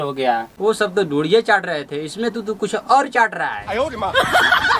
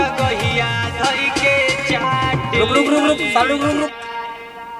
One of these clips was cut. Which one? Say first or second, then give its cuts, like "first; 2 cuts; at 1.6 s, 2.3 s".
first; 1 cut; at 3.6 s